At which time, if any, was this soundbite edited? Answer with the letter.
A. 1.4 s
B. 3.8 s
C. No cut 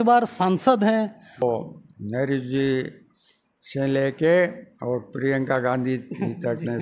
A